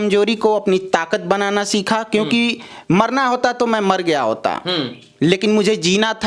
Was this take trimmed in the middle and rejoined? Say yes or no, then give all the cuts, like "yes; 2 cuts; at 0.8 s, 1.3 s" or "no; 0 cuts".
no; 0 cuts